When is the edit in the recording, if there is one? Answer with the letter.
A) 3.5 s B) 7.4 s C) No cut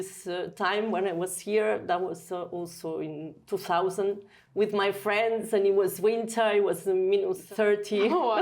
B